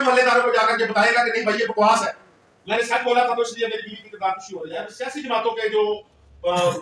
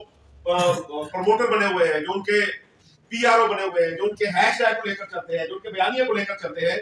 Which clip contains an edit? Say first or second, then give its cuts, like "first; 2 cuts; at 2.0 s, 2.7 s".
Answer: first; 1 cut; at 5.0 s